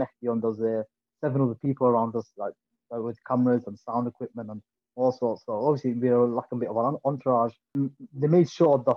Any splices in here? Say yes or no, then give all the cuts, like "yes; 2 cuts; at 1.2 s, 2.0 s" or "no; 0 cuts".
yes; 1 cut; at 7.6 s